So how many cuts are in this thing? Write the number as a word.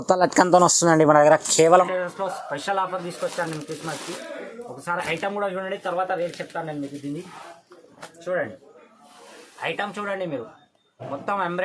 one